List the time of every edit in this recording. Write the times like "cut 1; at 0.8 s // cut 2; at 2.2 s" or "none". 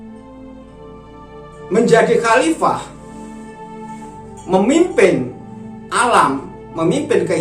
cut 1; at 1.7 s // cut 2; at 2.9 s // cut 3; at 4.4 s